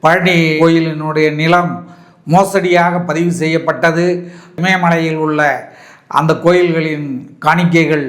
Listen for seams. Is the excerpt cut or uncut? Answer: uncut